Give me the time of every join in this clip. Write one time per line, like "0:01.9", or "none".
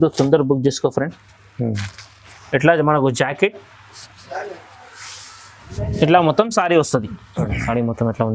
0:02.1